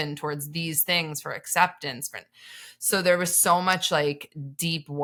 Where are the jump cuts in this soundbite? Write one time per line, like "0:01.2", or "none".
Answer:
none